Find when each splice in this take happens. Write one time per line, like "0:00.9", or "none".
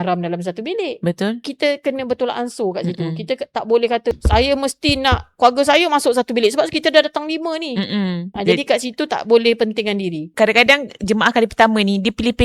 0:01.5
0:04.1
0:08.3
0:10.2